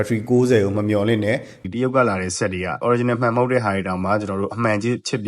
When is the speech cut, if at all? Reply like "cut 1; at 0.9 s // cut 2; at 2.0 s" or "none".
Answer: cut 1; at 1.5 s // cut 2; at 2.8 s